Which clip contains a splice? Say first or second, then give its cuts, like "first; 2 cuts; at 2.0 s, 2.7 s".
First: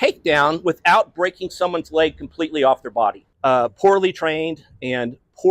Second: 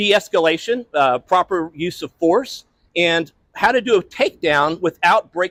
first; 1 cut; at 3.3 s